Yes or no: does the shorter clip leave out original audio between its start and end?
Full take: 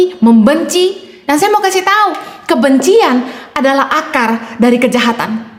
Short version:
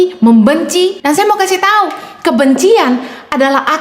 yes